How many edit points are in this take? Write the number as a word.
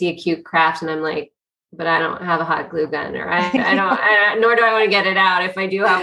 zero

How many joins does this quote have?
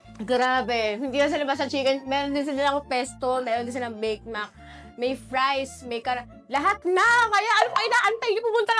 zero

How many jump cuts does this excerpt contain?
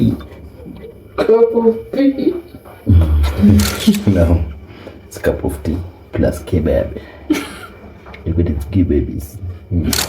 one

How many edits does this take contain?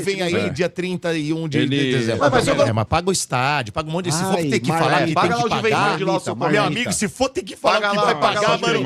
one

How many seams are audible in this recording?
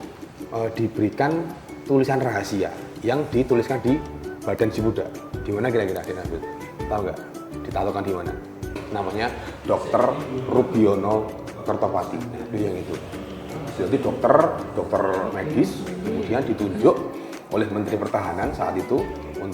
one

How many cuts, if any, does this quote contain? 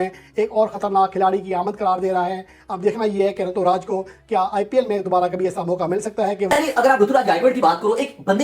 one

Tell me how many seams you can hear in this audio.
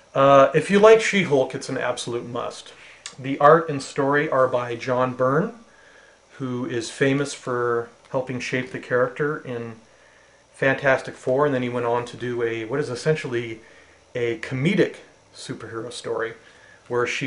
one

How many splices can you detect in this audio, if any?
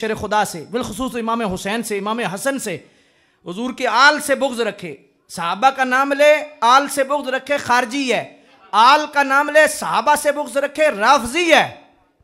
zero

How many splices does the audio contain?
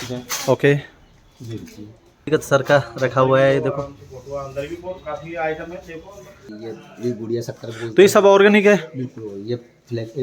two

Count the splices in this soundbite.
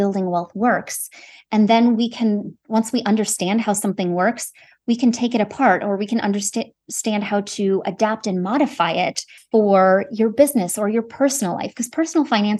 one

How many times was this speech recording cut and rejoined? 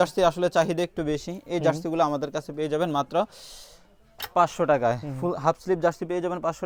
zero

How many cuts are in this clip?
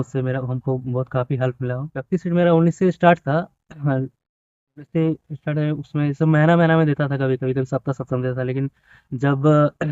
one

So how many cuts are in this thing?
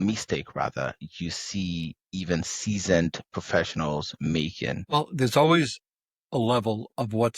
one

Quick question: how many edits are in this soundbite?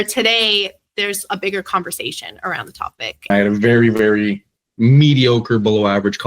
one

